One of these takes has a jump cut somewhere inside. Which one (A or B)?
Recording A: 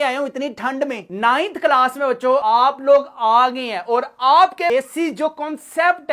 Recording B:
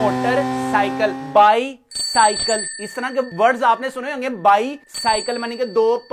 A